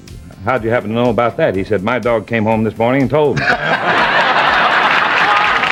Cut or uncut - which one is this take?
uncut